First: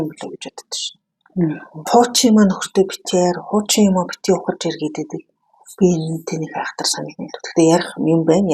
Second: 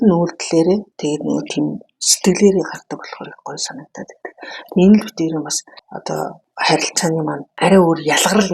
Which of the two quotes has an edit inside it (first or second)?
second